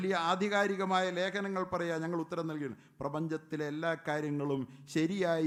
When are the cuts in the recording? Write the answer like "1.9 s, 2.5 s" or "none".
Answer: none